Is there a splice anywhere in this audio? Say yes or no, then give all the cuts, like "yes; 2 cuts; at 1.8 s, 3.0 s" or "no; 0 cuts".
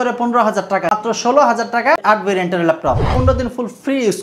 yes; 3 cuts; at 0.9 s, 2.0 s, 3.1 s